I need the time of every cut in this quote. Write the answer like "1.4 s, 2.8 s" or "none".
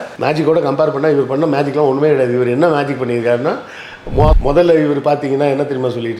4.3 s

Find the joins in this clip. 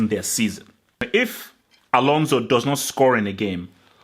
1.0 s

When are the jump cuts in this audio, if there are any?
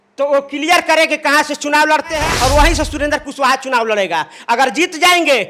2.3 s

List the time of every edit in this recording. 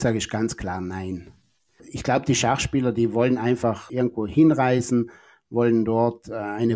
1.9 s, 3.9 s

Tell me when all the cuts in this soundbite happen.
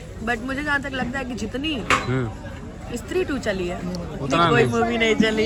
none

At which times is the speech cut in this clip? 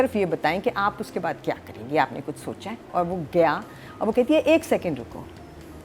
2.9 s

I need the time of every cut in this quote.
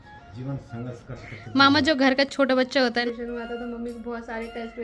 3.0 s

